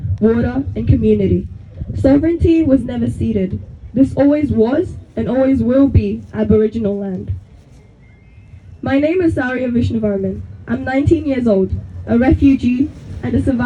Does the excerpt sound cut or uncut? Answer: uncut